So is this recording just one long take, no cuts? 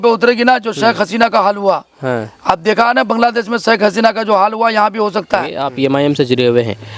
no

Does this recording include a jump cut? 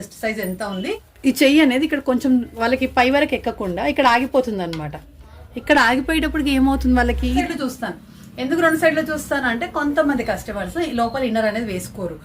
yes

